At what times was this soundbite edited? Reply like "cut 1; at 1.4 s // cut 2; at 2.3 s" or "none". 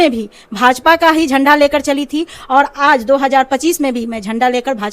none